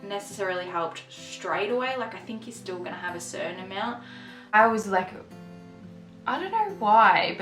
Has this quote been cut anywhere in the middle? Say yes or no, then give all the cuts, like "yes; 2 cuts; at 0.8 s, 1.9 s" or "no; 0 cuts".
yes; 1 cut; at 4.4 s